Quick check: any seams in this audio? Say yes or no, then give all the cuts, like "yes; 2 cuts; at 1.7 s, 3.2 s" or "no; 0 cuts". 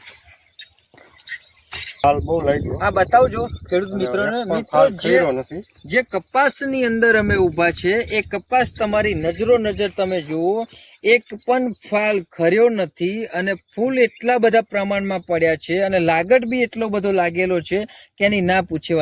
yes; 1 cut; at 2.0 s